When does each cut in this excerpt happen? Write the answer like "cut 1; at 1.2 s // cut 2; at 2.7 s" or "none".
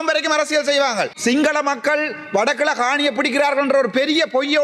cut 1; at 1.1 s